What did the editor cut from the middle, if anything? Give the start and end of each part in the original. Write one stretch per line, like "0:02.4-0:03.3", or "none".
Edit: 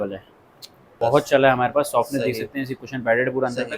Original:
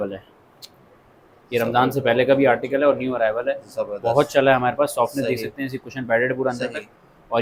0:00.9-0:03.9